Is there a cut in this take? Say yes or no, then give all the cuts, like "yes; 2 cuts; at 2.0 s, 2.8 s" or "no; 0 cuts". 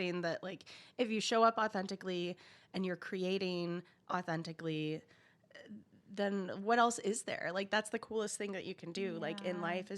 no; 0 cuts